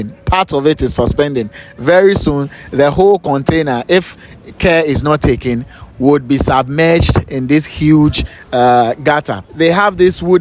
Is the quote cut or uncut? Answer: cut